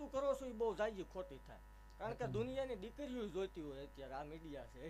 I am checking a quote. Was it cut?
no; 0 cuts

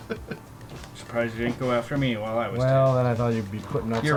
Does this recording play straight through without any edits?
yes; 0 cuts

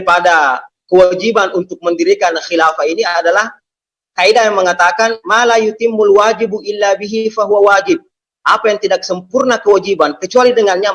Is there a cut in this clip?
no; 0 cuts

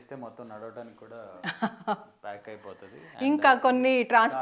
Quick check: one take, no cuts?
yes; 0 cuts

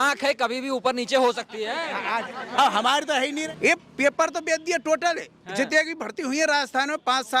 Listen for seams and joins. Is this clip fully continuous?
no; 1 cut; at 3.4 s

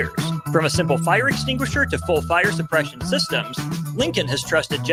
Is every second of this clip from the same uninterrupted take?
yes; 0 cuts

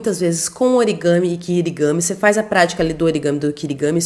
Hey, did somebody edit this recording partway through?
no; 0 cuts

